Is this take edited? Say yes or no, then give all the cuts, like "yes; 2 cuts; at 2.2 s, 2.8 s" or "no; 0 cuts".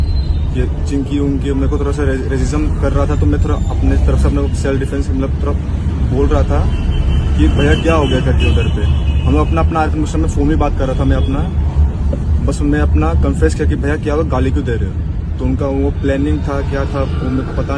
no; 0 cuts